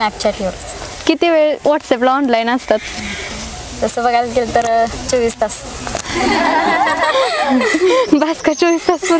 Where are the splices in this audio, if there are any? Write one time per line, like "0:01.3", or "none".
none